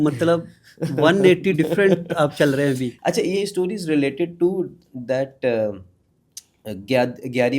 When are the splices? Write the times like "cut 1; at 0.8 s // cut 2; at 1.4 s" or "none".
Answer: cut 1; at 2.9 s